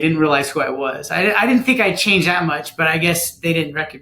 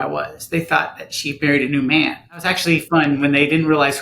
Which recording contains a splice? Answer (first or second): second